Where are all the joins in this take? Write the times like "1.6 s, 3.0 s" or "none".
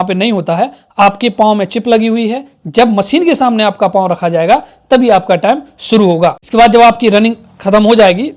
none